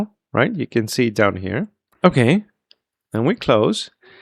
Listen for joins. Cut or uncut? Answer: cut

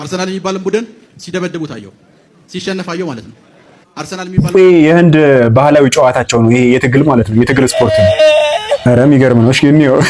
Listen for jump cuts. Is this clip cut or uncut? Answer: cut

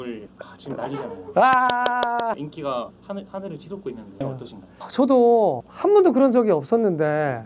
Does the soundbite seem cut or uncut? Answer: uncut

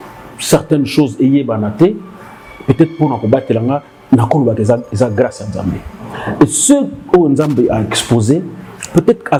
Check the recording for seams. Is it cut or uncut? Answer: uncut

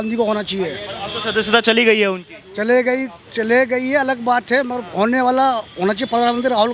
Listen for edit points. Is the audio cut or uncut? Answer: uncut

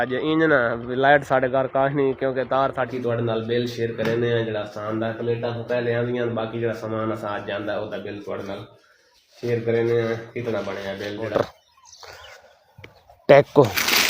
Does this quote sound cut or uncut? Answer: cut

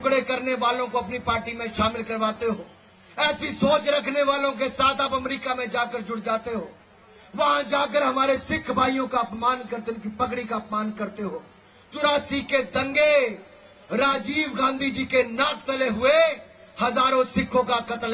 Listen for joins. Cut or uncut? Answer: uncut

